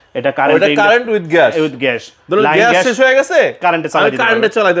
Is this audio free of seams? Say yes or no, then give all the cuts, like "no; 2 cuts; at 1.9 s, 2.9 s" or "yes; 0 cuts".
yes; 0 cuts